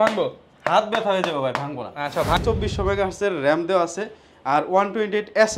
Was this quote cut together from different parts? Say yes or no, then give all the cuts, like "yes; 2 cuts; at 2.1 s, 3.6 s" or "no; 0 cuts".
yes; 1 cut; at 2.4 s